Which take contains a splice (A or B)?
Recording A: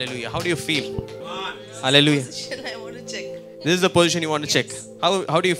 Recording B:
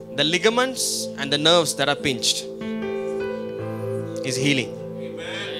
A